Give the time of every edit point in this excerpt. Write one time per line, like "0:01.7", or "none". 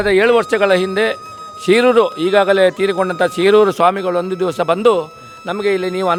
none